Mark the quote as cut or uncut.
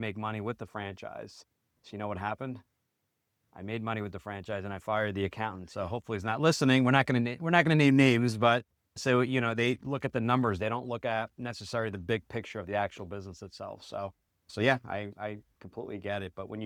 uncut